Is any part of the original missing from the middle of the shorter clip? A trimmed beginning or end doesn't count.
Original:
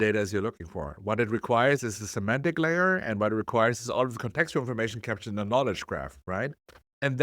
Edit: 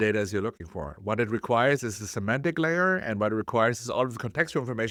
no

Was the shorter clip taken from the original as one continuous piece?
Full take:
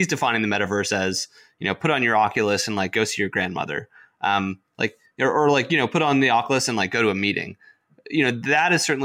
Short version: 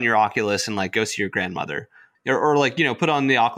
no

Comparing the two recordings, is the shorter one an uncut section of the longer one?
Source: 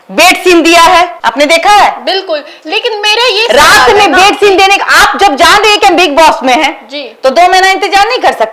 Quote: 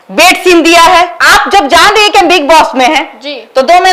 no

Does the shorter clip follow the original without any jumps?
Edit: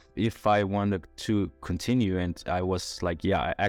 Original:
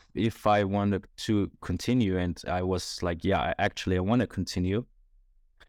yes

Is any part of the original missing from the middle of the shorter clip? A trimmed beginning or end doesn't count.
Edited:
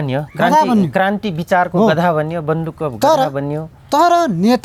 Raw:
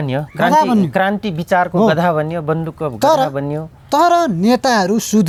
no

